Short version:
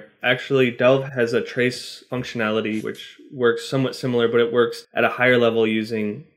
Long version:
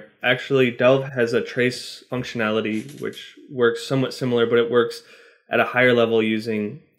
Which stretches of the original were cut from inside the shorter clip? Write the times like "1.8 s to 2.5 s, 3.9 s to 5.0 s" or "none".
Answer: 2.9 s to 3.0 s, 5.0 s to 5.4 s